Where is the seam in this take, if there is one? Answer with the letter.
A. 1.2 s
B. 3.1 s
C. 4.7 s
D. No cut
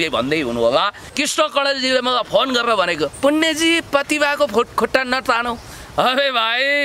A